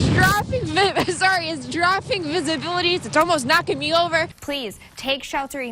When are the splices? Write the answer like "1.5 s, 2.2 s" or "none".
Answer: 4.4 s